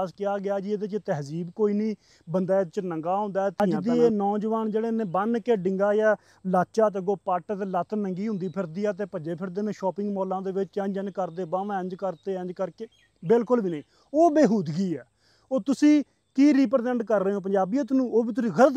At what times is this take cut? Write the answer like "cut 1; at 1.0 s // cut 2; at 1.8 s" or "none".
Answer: cut 1; at 3.7 s

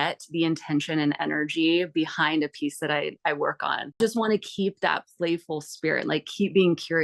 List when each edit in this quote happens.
cut 1; at 4.0 s

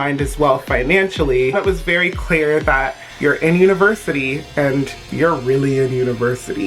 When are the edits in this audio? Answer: cut 1; at 1.5 s // cut 2; at 3.1 s

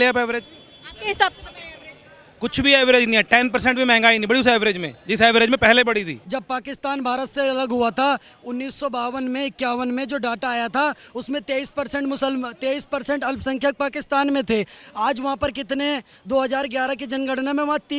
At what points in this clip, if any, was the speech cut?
cut 1; at 6.2 s

